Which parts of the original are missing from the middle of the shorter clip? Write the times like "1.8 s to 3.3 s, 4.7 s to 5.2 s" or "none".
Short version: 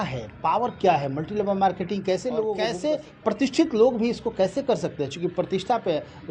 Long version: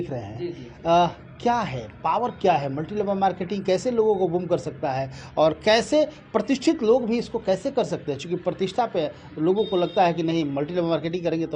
4.4 s to 5.8 s

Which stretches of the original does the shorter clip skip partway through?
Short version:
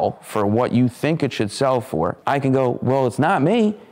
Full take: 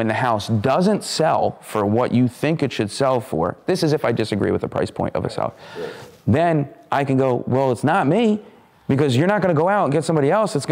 3.6 s to 6.8 s

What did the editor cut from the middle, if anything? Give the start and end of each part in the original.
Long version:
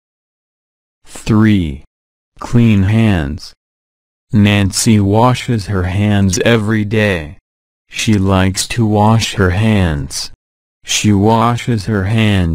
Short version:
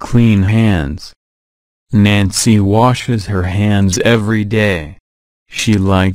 none

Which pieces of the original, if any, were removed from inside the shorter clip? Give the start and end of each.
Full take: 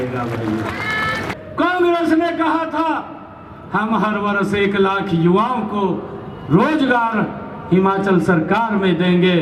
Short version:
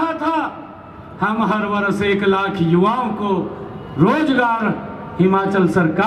none

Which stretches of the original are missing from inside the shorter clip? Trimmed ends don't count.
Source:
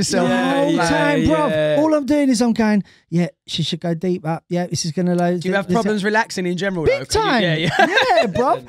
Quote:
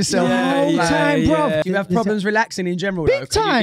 1.6 s to 5.4 s

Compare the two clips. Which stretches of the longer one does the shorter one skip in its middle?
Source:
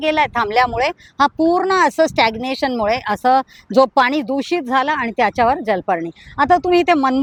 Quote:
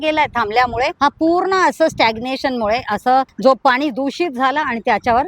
0.9 s to 1.1 s, 3.5 s to 3.6 s

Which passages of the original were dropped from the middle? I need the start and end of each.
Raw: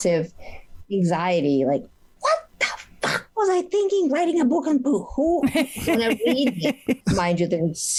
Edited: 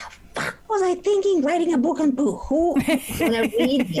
none

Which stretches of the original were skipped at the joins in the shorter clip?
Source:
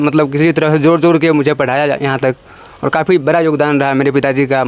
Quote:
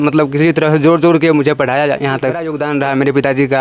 2.5 s to 3.5 s

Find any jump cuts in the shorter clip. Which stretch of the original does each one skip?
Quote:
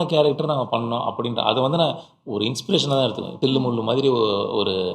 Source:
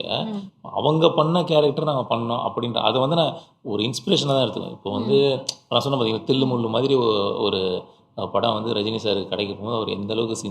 4.7 s to 6.2 s

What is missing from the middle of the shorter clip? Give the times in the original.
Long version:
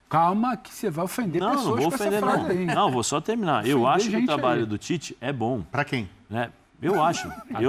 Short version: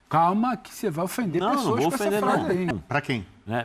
2.7 s to 5.5 s

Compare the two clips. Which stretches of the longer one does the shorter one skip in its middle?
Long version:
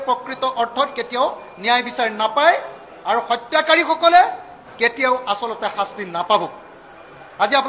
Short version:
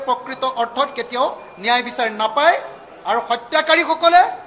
none

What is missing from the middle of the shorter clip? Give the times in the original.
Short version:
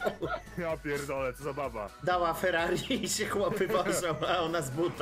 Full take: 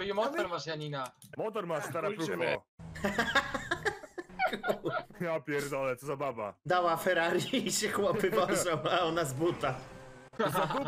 none

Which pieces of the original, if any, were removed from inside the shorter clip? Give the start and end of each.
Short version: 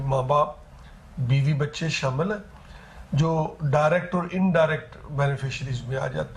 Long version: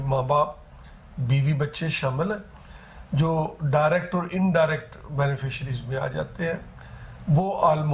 none

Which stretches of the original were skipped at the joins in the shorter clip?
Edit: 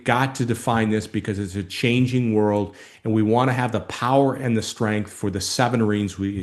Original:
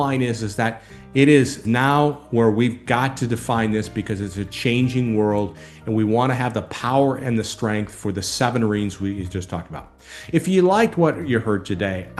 none

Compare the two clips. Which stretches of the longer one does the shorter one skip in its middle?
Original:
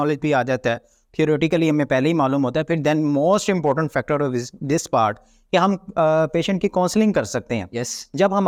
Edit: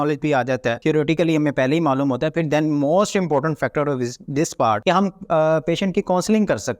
0.8 s to 1.1 s, 5.1 s to 5.5 s

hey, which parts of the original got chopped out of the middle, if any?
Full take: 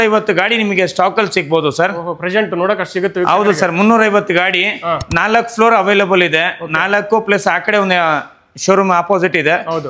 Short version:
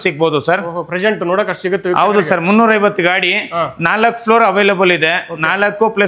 none

